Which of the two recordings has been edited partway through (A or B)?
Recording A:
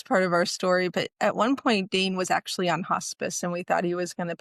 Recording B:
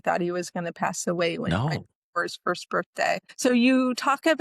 B